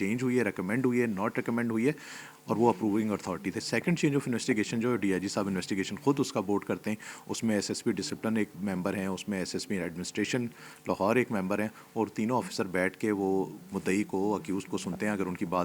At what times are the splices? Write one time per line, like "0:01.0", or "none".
none